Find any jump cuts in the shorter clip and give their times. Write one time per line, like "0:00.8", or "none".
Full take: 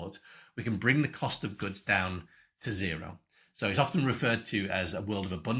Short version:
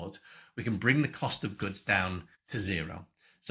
0:02.4